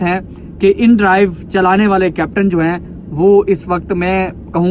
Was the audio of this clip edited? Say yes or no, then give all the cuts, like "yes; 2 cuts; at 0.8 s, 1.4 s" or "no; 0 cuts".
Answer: no; 0 cuts